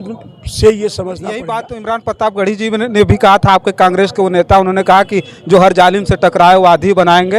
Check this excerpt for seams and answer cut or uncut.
cut